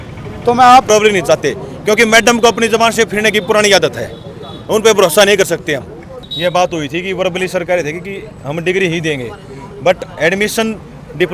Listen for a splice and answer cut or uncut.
cut